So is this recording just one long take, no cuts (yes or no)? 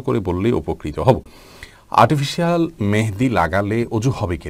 yes